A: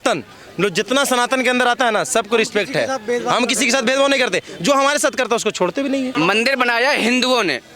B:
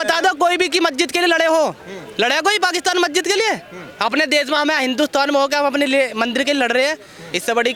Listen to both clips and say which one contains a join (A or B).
A